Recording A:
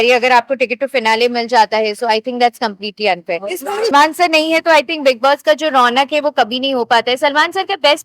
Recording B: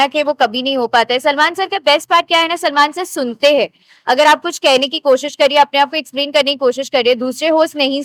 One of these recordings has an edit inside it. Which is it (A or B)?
A